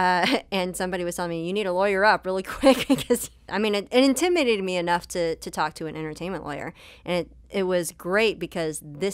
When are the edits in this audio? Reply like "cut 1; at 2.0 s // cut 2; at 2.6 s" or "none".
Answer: cut 1; at 3.3 s